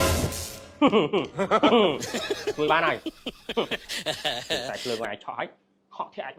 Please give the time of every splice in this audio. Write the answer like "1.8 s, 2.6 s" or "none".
none